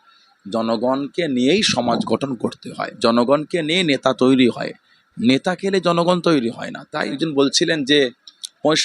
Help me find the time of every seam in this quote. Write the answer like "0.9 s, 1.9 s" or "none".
7.2 s